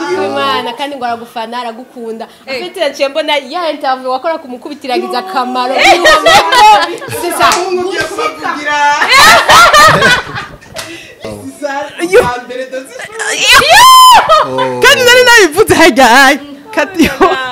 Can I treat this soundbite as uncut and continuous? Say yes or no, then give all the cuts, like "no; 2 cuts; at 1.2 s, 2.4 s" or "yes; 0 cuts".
no; 1 cut; at 11.3 s